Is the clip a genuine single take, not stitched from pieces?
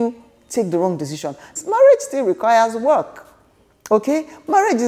no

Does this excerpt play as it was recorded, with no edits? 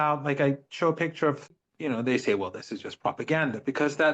no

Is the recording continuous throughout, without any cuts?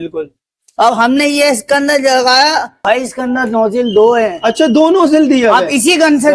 no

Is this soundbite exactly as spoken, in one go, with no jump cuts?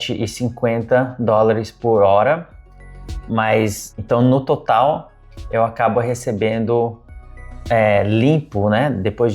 no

